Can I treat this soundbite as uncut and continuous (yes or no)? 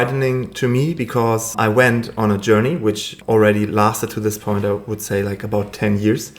no